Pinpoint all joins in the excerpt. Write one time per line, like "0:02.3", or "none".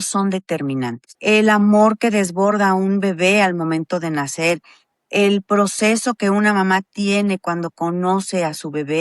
0:01.1